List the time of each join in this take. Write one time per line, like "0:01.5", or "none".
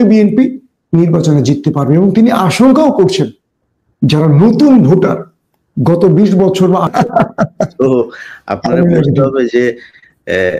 0:06.9